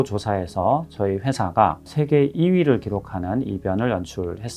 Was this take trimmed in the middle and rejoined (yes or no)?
no